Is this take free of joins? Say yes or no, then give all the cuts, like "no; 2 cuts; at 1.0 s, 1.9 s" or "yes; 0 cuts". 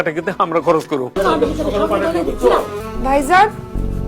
no; 2 cuts; at 1.1 s, 2.8 s